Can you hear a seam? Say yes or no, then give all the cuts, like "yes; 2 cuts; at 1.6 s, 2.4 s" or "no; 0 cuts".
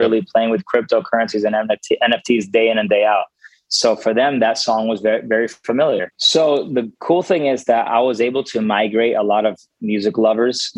yes; 1 cut; at 6.2 s